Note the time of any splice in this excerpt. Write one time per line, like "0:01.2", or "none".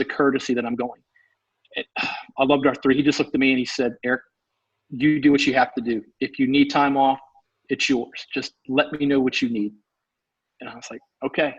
none